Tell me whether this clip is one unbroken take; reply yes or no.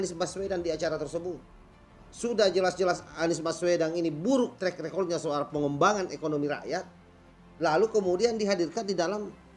yes